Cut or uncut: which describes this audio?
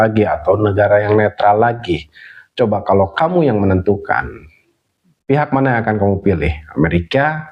uncut